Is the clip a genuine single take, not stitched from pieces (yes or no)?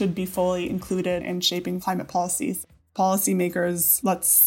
no